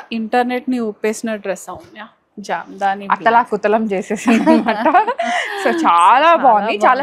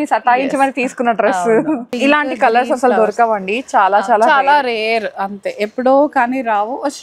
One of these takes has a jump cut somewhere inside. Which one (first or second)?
second